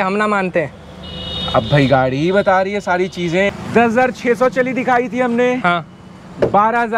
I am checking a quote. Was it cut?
yes; 1 cut; at 3.5 s

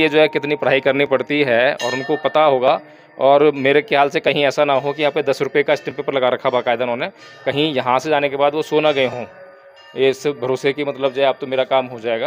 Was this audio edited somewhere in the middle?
no; 0 cuts

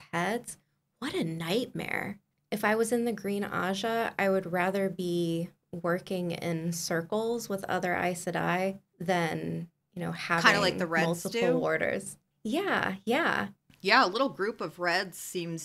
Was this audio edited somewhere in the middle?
yes; 1 cut; at 2.3 s

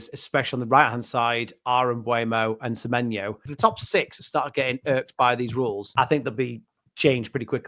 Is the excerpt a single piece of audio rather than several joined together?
no; 2 cuts; at 3.4 s, 5.8 s

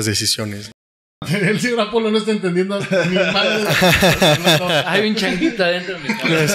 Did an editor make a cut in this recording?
yes; 1 cut; at 0.9 s

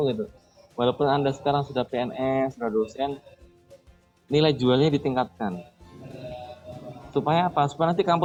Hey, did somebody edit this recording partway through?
no; 0 cuts

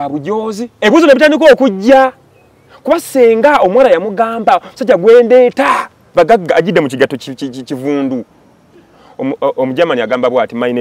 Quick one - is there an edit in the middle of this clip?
no; 0 cuts

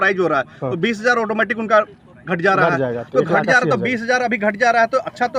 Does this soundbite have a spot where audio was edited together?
no; 0 cuts

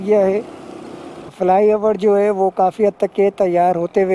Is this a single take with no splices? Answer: no; 1 cut; at 1.3 s

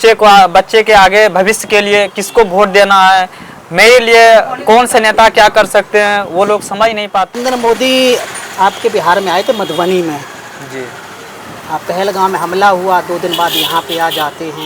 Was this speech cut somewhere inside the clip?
yes; 1 cut; at 7.4 s

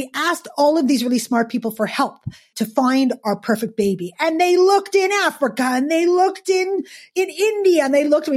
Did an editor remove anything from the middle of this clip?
yes; 2 cuts; at 2.5 s, 7.1 s

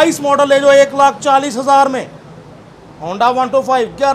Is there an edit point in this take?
no; 0 cuts

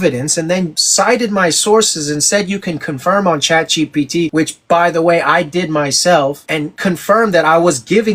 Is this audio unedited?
yes; 0 cuts

